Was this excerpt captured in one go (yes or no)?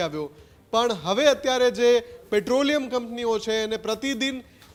yes